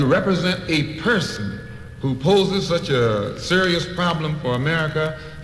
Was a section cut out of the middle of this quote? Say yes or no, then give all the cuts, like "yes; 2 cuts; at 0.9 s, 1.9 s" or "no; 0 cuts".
yes; 1 cut; at 2.2 s